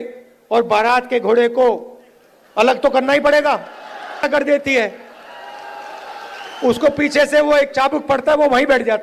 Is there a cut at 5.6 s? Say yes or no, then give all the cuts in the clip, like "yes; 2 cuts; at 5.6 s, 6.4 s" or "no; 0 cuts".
no; 1 cut; at 4.2 s